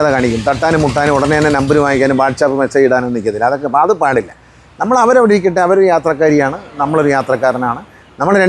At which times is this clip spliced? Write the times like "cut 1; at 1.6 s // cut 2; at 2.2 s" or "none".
none